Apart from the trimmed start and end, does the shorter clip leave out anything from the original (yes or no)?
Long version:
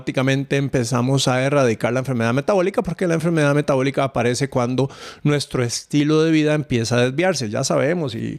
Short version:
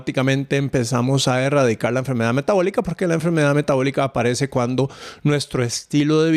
no